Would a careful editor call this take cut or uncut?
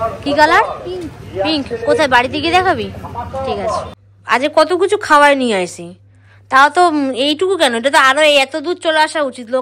cut